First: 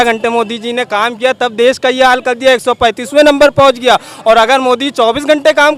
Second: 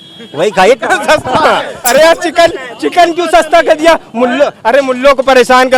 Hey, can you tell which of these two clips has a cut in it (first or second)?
second